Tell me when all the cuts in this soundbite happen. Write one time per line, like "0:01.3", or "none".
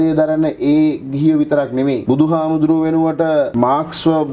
0:02.0
0:03.5